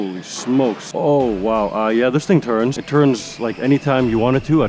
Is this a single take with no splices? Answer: no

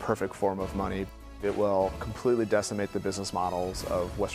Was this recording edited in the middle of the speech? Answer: yes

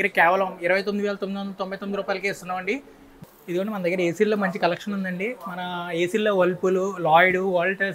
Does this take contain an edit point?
no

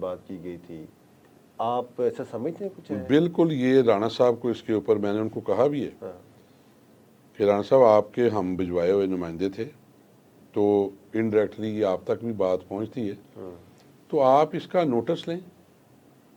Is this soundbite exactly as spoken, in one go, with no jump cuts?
yes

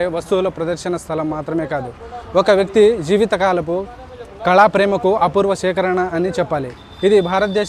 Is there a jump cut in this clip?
no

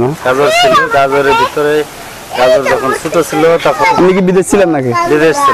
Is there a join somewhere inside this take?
yes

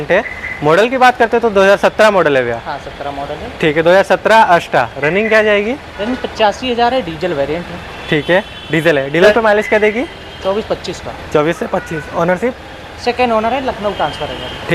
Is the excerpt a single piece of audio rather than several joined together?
yes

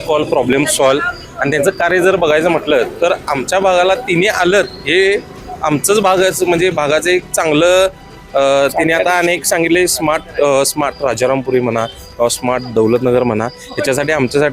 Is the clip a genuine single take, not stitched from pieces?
yes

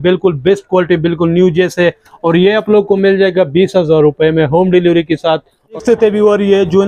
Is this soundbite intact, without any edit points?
no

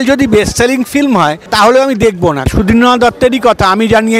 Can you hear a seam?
yes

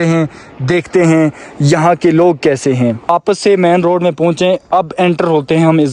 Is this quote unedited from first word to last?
yes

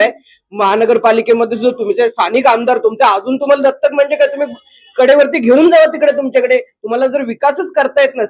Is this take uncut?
yes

